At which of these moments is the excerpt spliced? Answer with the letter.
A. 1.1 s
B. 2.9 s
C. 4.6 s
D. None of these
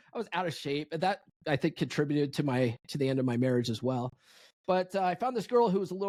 D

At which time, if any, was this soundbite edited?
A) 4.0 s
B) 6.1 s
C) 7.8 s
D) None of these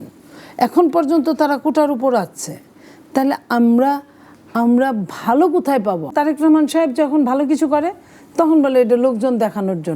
B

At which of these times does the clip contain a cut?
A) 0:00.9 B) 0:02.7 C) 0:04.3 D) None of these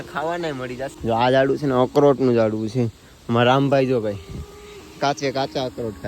A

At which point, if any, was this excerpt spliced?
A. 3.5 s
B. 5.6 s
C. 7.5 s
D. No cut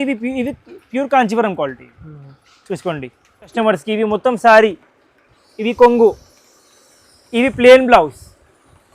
A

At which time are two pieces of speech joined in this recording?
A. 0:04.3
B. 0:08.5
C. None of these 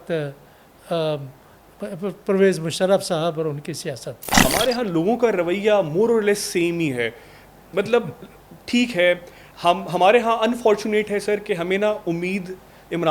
A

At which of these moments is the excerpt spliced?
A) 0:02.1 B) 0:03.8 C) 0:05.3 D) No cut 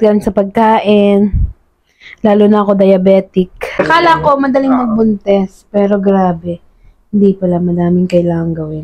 B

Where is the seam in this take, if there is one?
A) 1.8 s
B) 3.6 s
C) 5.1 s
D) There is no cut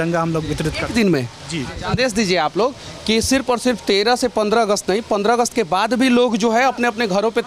A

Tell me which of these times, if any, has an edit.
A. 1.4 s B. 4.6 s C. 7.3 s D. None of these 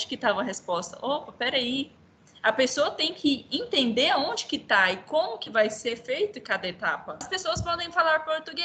C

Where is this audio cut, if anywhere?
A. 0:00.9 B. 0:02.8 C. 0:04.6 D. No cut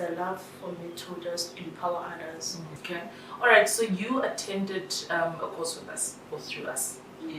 B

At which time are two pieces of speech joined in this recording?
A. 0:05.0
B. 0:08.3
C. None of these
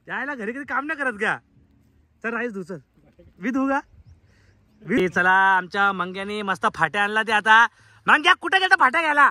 A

